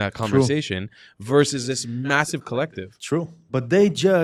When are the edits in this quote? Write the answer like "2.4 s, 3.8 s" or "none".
none